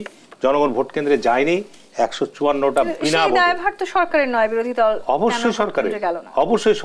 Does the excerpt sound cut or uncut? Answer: uncut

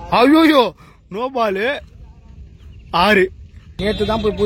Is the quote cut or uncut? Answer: cut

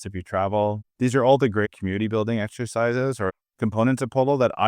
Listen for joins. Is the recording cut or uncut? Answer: cut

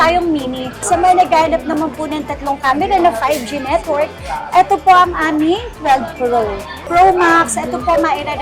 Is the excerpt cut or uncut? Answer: cut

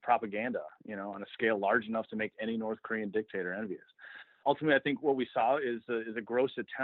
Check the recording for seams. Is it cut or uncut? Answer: cut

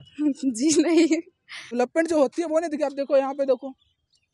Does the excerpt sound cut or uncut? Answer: cut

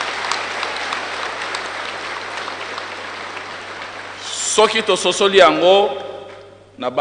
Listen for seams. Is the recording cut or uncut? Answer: uncut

